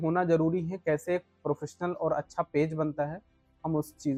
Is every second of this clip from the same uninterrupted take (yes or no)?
yes